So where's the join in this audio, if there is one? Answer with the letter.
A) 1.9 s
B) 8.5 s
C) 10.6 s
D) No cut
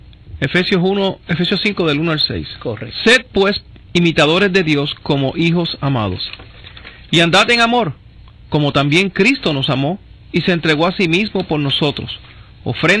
A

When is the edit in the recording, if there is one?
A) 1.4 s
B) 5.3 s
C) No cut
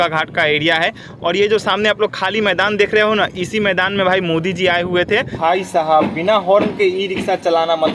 B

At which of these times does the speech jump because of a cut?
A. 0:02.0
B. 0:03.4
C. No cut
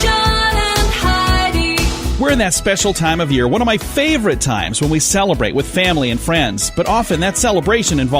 A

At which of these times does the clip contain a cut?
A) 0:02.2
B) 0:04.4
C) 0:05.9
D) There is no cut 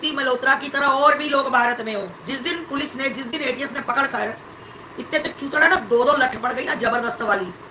A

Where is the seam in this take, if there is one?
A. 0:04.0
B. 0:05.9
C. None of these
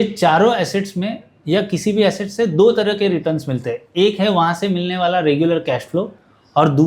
C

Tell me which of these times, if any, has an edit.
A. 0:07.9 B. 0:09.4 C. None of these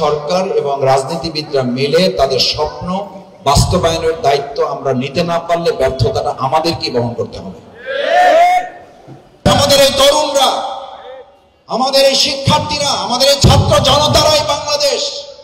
B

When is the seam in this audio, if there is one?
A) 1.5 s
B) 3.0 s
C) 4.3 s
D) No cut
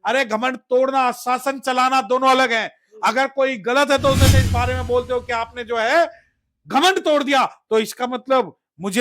C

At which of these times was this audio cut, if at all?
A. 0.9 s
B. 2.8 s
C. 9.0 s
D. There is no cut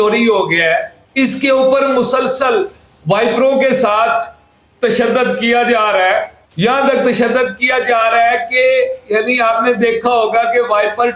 A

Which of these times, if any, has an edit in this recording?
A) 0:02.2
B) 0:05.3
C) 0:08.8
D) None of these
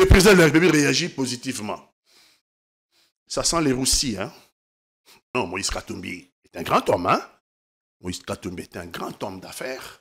B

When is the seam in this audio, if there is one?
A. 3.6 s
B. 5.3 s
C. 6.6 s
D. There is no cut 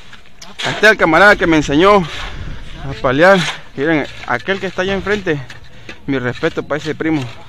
A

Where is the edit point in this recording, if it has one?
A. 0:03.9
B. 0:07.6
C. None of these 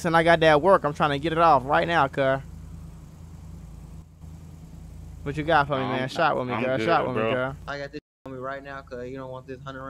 B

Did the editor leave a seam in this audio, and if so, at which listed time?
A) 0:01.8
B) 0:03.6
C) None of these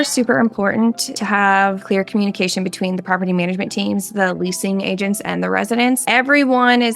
A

